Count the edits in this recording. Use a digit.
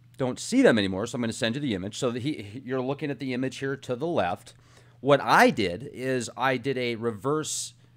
1